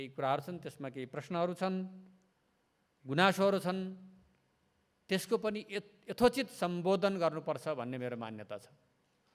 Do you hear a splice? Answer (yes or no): no